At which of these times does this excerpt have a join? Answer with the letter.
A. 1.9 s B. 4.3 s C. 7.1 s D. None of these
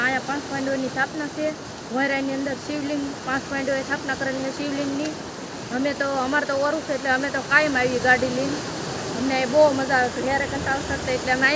D